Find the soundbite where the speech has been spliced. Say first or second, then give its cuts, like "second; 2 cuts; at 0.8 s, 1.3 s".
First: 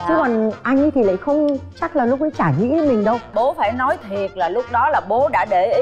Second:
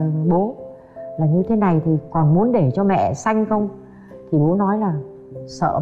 first; 1 cut; at 3.3 s